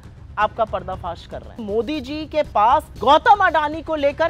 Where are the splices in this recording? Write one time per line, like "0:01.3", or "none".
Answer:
0:01.6
0:02.9